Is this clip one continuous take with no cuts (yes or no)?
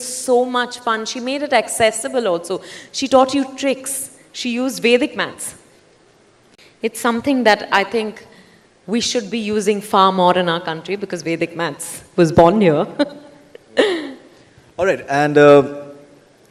yes